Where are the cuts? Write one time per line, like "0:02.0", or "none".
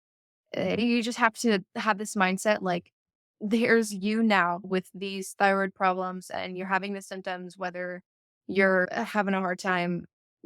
0:04.7
0:08.9